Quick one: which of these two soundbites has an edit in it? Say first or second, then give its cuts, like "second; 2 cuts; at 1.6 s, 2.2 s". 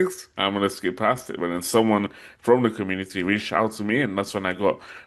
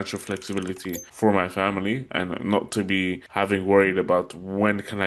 second; 2 cuts; at 1.1 s, 3.2 s